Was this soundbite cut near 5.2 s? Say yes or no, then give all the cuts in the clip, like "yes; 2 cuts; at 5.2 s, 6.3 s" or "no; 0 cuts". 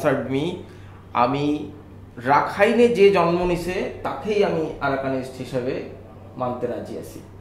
no; 0 cuts